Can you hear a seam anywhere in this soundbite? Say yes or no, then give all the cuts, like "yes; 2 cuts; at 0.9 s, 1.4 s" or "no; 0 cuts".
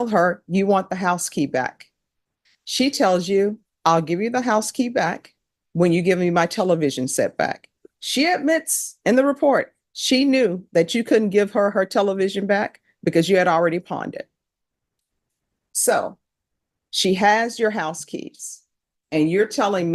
no; 0 cuts